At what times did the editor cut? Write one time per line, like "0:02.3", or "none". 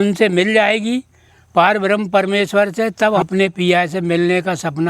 0:03.2